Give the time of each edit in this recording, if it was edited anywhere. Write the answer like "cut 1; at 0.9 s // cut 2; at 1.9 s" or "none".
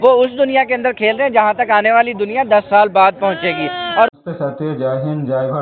none